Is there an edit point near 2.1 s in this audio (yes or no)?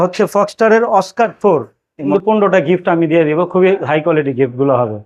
yes